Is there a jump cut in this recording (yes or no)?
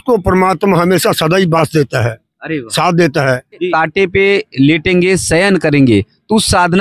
yes